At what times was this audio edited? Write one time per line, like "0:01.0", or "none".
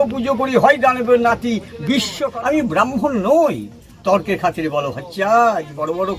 0:02.3